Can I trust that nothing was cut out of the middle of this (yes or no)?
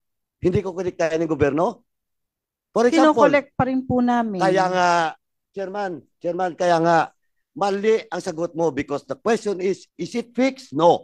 yes